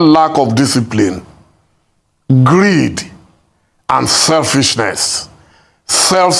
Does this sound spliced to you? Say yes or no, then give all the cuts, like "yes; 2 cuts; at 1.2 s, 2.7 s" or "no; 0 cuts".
no; 0 cuts